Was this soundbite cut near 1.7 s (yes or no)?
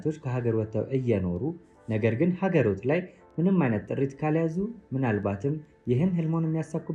no